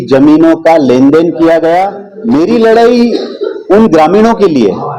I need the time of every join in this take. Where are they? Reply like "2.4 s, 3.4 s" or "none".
2.1 s

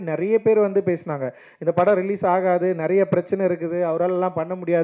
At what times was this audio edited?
none

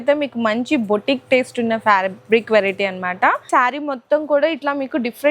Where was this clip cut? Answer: 3.5 s

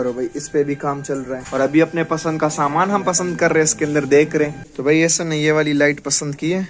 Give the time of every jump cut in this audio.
1.4 s, 4.7 s

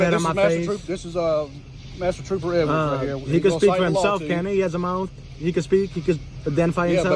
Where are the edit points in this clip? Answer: none

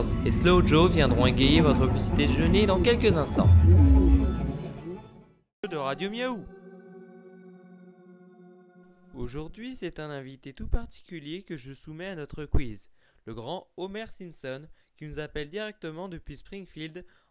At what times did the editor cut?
5.6 s

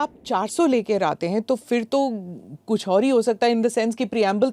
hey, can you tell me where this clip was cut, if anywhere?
none

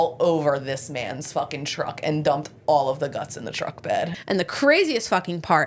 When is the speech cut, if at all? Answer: 4.2 s

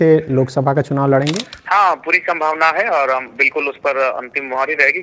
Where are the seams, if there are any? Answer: 1.5 s

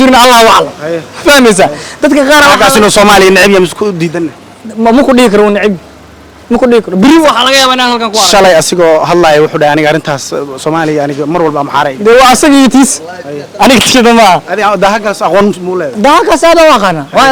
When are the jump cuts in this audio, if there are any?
none

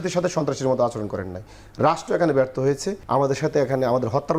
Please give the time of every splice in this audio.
2.9 s

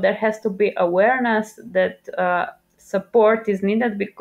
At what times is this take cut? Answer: none

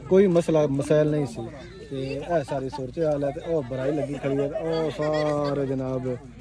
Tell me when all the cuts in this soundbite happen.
none

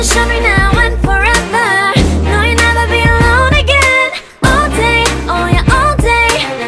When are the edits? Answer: none

